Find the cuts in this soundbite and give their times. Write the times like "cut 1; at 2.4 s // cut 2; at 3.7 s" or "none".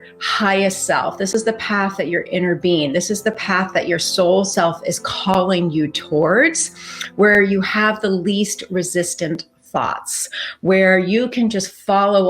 none